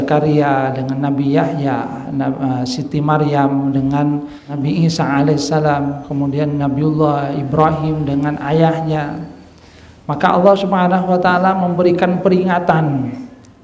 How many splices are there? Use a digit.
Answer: 1